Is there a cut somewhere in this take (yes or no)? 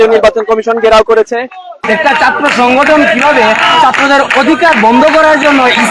yes